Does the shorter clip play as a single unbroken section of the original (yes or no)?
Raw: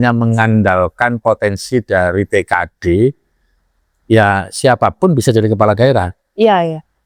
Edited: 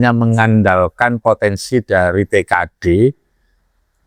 yes